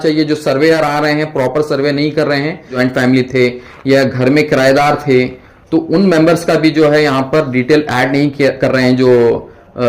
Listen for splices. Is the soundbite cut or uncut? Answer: cut